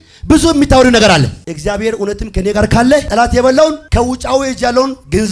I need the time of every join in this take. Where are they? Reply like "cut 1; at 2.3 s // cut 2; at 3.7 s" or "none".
cut 1; at 1.4 s // cut 2; at 3.1 s // cut 3; at 3.8 s